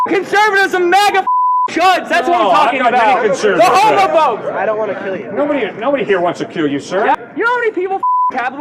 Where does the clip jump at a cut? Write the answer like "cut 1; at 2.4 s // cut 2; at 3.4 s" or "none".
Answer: cut 1; at 7.2 s